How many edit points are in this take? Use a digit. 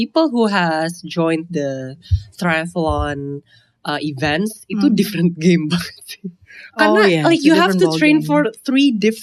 0